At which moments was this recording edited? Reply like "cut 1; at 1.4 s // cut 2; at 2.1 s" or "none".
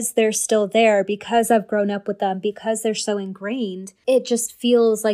cut 1; at 3.9 s